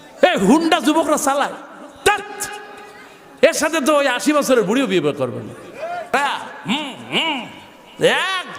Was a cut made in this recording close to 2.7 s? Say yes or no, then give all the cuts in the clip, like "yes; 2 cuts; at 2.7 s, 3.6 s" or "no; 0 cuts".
no; 1 cut; at 6.1 s